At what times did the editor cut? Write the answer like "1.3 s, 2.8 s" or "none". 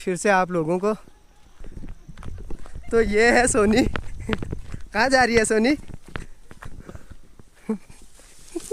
1.6 s